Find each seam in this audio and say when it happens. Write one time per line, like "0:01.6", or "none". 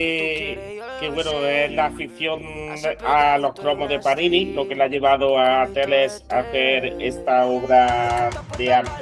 none